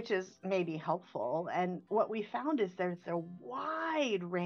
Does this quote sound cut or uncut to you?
uncut